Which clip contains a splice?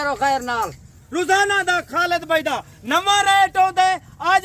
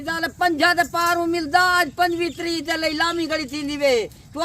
first; 1 cut; at 1.0 s

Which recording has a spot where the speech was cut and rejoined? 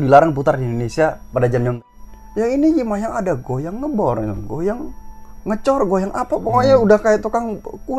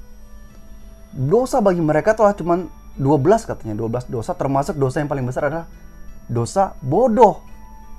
first; 1 cut; at 1.8 s

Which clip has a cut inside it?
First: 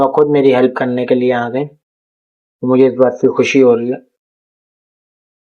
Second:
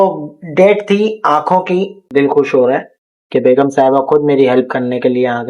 second; 1 cut; at 2.0 s

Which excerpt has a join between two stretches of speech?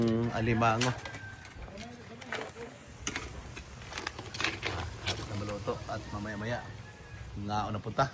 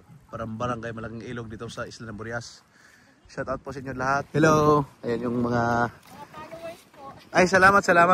second; 1 cut; at 4.3 s

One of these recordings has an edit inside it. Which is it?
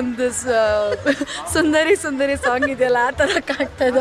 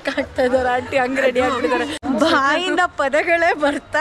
second; 1 cut; at 1.9 s

